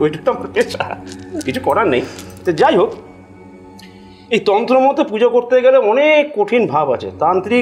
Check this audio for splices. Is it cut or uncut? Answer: uncut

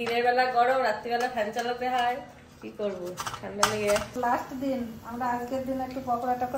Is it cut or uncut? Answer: uncut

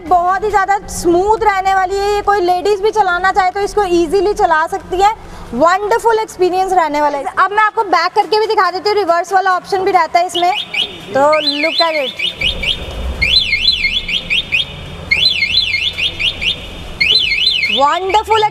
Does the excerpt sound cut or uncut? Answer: uncut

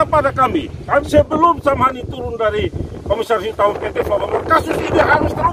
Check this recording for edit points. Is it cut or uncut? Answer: cut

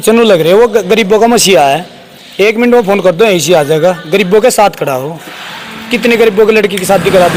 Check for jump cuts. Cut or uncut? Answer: uncut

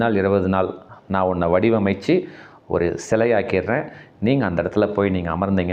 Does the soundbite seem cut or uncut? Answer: uncut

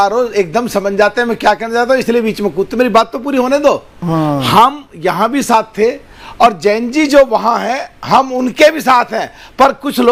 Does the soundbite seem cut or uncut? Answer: uncut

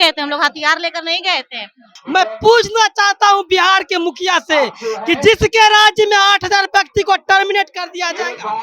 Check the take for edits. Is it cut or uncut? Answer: cut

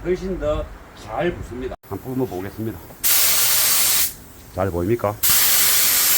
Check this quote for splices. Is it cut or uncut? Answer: cut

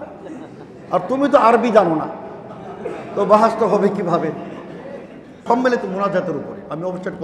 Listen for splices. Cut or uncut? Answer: cut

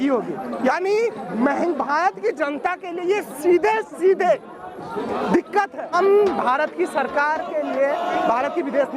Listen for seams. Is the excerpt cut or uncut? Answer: cut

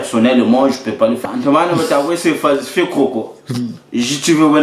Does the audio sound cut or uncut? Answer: cut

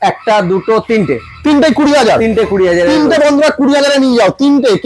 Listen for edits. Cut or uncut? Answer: uncut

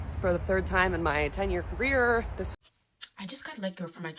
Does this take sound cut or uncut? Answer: cut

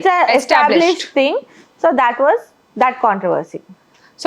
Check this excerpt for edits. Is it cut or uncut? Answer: uncut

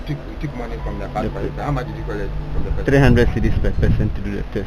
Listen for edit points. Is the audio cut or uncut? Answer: uncut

